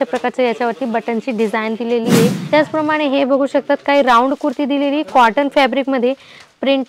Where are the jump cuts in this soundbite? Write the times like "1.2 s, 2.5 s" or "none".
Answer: 2.4 s